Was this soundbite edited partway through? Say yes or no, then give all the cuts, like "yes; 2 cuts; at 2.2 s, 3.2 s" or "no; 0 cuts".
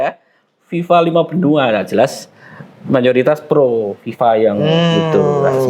no; 0 cuts